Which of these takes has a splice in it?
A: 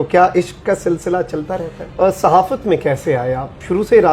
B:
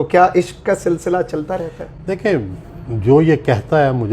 A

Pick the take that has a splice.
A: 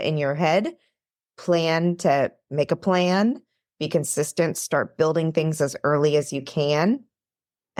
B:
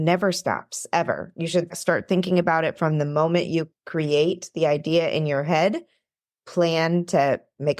B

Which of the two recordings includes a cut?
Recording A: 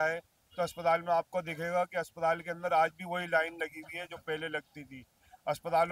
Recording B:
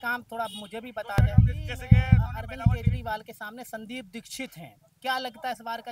B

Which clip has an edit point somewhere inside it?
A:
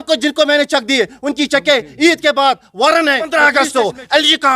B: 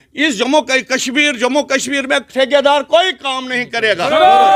A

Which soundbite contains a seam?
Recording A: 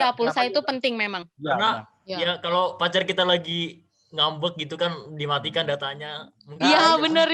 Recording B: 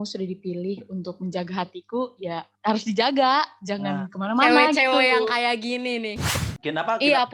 B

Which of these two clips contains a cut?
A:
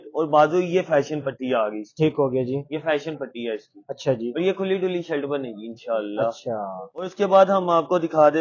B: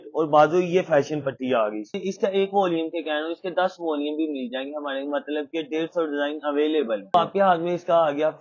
B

